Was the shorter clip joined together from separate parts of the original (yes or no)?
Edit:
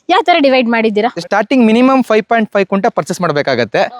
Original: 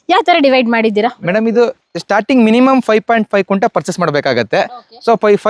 yes